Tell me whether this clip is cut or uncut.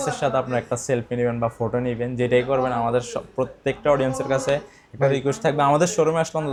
uncut